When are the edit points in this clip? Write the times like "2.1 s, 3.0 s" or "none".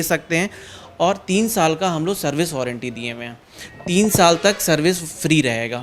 none